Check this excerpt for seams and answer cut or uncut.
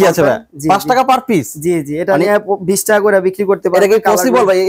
uncut